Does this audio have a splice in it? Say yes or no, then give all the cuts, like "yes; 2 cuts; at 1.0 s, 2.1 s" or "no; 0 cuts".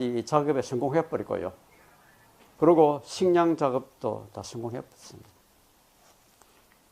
yes; 1 cut; at 1.3 s